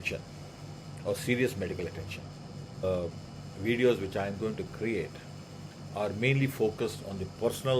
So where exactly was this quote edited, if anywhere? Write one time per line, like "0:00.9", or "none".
0:02.8